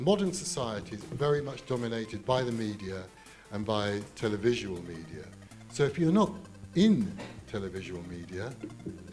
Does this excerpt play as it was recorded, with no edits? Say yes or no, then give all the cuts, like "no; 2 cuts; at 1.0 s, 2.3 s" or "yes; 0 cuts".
yes; 0 cuts